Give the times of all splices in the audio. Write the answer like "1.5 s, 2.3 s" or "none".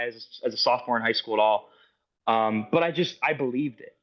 none